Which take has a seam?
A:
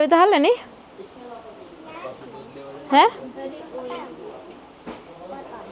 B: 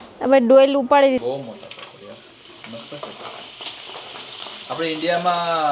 B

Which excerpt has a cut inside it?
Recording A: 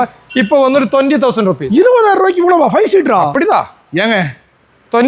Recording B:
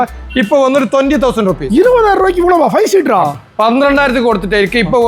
B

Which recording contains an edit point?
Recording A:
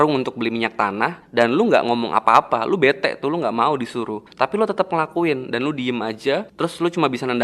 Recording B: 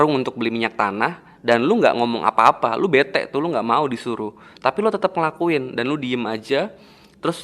A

